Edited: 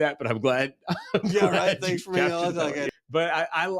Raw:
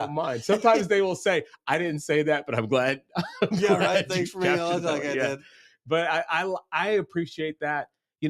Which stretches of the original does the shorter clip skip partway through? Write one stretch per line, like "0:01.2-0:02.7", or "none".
0:05.2-0:05.7